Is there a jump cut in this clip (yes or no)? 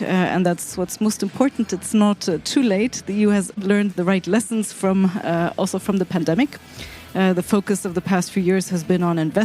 yes